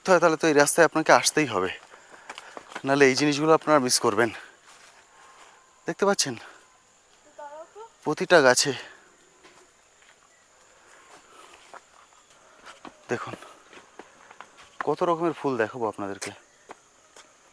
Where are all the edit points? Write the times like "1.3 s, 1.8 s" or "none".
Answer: none